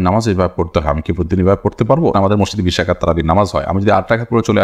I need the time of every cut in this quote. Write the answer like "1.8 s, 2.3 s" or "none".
2.1 s